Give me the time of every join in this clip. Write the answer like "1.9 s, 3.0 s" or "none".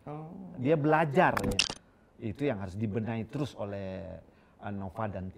1.5 s